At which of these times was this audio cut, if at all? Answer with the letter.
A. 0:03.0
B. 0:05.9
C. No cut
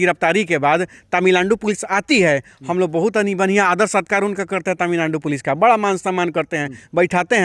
C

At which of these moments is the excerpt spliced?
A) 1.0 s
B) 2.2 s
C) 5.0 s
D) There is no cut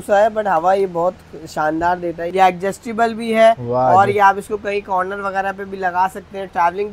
B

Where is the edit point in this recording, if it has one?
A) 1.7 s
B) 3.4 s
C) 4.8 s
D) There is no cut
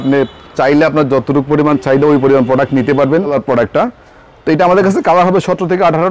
B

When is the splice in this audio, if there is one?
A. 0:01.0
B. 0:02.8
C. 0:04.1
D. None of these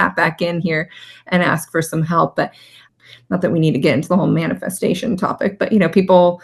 B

